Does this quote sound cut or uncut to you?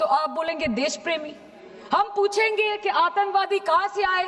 uncut